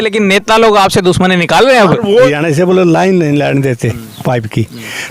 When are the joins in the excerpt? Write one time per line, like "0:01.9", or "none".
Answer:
0:02.1